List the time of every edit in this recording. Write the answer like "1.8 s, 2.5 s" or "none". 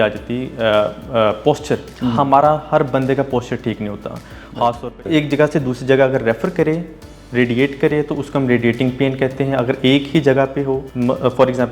1.9 s, 5.0 s, 10.9 s